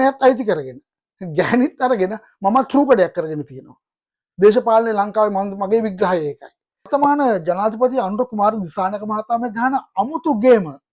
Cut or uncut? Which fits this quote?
cut